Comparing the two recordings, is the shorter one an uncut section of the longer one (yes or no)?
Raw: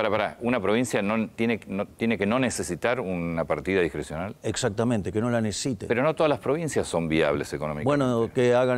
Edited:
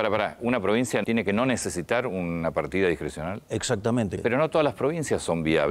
no